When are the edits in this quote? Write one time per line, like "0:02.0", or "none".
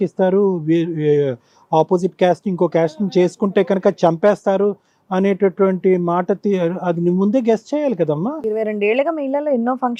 none